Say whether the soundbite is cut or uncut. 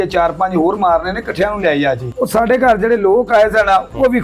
cut